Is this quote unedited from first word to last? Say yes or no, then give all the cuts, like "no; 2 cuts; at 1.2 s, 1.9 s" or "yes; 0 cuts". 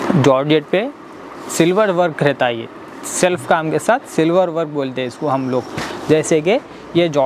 yes; 0 cuts